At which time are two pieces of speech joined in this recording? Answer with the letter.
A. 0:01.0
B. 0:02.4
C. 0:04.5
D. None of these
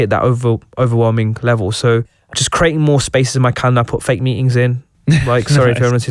B